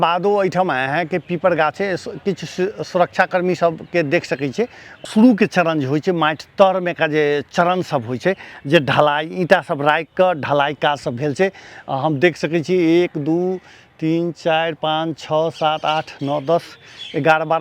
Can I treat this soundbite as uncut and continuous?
no; 1 cut; at 4.9 s

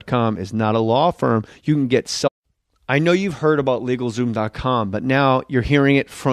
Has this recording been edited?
no; 0 cuts

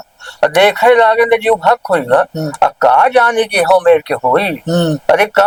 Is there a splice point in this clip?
no; 0 cuts

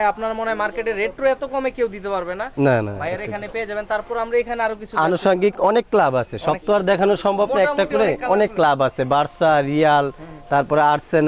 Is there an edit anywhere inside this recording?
no; 0 cuts

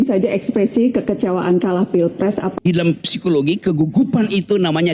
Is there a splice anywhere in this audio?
yes; 1 cut; at 2.5 s

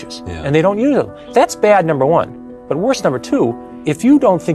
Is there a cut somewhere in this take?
yes; 2 cuts; at 1.2 s, 3.7 s

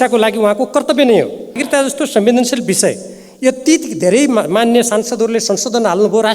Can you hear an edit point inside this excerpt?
yes; 1 cut; at 1.6 s

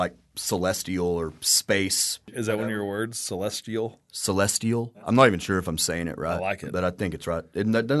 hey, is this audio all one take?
yes; 0 cuts

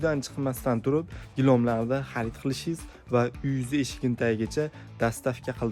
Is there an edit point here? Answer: no; 0 cuts

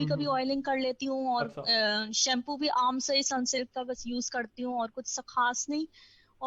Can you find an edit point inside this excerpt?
no; 0 cuts

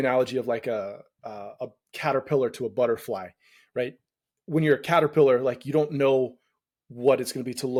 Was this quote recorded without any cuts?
yes; 0 cuts

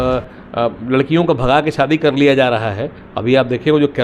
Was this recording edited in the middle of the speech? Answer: no; 0 cuts

